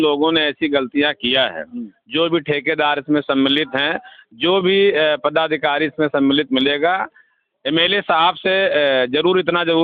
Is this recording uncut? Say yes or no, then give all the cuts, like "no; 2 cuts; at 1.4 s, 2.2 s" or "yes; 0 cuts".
yes; 0 cuts